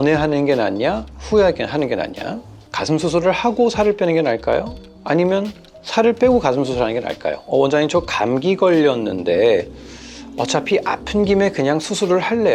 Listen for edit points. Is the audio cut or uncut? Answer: cut